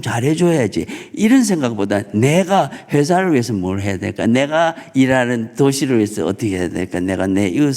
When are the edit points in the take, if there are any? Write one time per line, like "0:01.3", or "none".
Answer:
none